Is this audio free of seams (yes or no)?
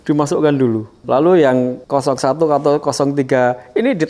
no